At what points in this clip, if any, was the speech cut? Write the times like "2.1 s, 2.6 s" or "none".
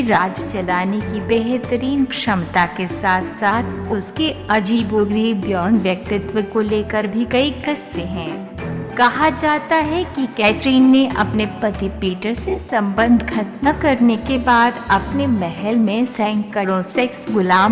1.0 s

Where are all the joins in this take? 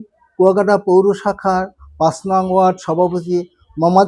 none

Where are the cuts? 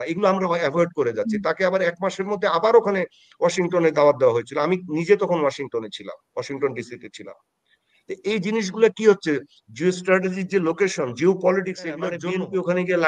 12.2 s

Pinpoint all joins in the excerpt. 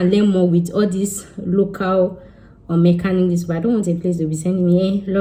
none

